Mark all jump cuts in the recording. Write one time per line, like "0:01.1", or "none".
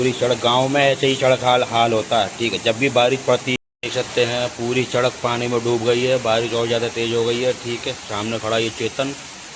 0:03.6